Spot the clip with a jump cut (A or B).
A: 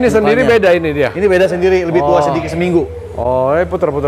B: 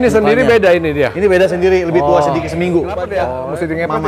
B